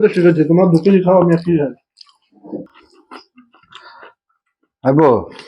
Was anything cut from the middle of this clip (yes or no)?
yes